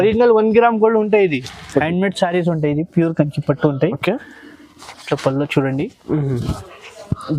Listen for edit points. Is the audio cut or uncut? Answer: cut